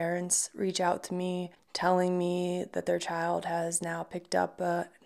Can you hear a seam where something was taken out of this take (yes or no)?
no